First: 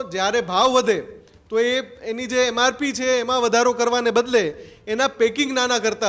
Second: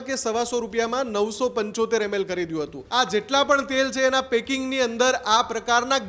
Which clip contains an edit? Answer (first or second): second